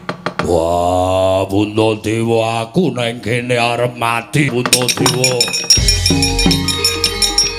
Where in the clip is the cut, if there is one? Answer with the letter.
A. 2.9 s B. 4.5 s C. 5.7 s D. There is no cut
B